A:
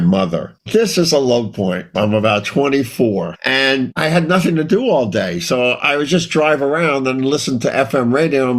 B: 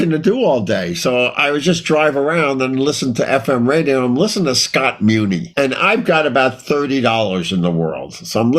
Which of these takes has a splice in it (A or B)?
B